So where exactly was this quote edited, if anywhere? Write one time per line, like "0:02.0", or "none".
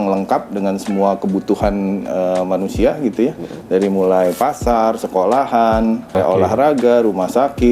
0:06.2